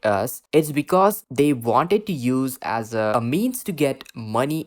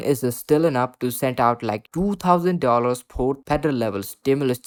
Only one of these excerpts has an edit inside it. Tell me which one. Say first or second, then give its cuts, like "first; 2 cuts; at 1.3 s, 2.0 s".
first; 1 cut; at 3.1 s